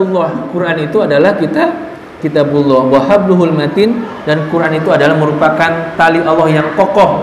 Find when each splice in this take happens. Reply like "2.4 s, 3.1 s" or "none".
none